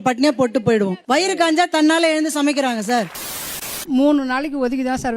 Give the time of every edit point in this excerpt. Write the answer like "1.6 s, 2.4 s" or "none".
1.0 s, 3.2 s

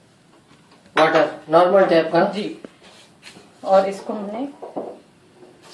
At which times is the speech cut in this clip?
none

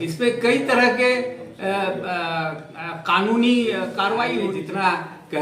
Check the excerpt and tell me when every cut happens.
4.4 s

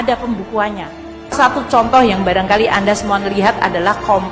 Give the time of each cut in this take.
1.3 s

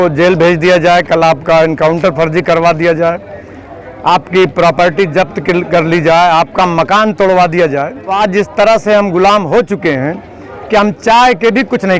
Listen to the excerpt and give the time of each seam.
8.1 s

